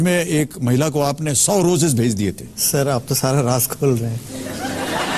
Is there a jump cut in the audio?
no; 0 cuts

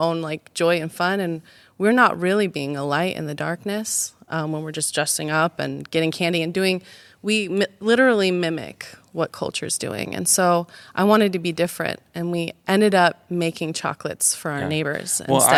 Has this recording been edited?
no; 0 cuts

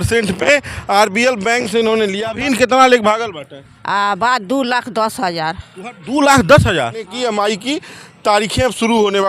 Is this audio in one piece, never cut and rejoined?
no; 2 cuts; at 2.2 s, 7.1 s

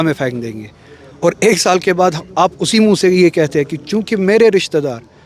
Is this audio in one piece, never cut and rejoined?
yes; 0 cuts

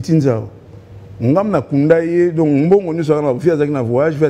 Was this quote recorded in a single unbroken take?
yes; 0 cuts

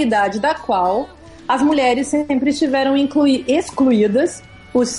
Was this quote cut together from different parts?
no; 0 cuts

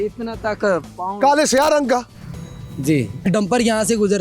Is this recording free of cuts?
no; 1 cut; at 3.3 s

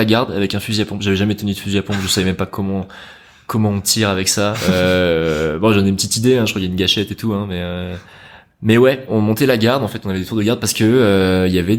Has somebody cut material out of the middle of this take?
no; 0 cuts

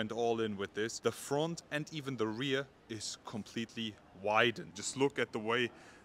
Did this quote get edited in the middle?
yes; 2 cuts; at 0.9 s, 4.7 s

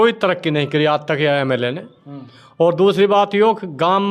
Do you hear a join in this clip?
no; 0 cuts

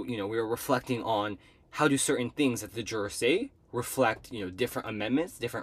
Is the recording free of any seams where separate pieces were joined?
yes; 0 cuts

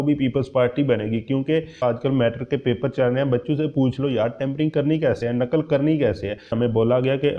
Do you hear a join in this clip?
yes; 2 cuts; at 1.8 s, 6.5 s

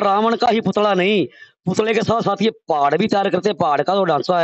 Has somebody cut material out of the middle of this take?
no; 0 cuts

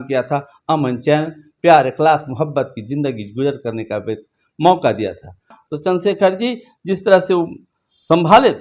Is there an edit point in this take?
yes; 1 cut; at 5.6 s

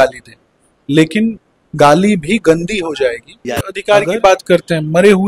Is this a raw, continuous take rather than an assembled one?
no; 1 cut; at 3.7 s

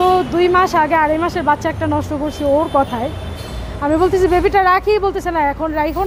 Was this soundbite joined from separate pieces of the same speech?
no; 0 cuts

